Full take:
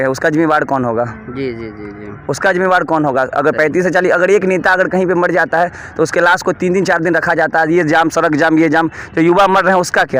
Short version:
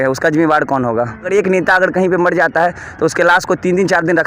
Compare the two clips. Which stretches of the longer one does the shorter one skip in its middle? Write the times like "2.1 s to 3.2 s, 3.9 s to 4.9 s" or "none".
1.3 s to 4.3 s